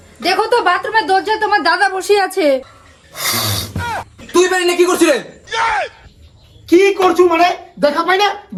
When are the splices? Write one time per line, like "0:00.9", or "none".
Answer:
none